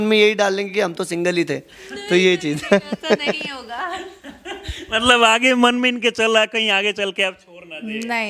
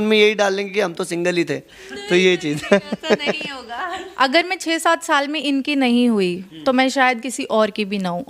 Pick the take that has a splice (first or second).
second